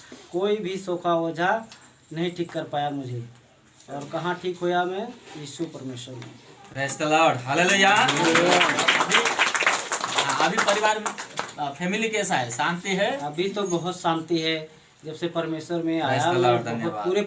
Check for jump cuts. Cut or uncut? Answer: uncut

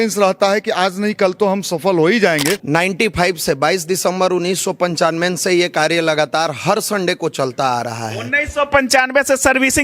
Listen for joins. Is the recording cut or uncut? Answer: cut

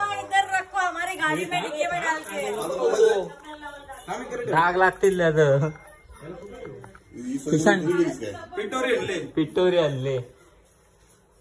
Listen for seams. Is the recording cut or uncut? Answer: uncut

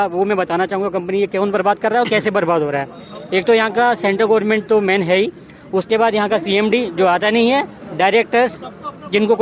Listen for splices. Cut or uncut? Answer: uncut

